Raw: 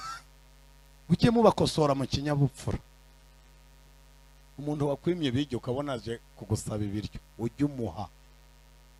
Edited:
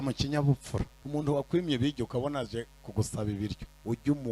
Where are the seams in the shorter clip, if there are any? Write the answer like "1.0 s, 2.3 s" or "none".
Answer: 1.0 s